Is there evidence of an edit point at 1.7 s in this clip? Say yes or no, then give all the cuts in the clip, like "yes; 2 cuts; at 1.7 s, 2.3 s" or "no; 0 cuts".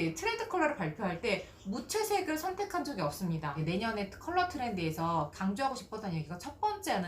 no; 2 cuts; at 3.6 s, 5.3 s